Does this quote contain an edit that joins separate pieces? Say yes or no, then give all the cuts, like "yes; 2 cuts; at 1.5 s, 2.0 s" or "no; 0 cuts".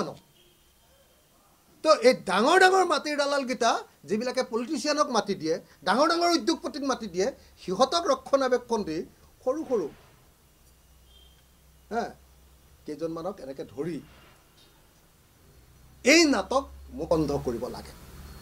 yes; 1 cut; at 17.1 s